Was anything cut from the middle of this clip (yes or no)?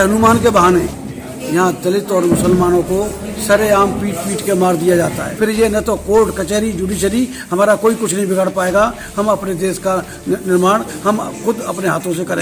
yes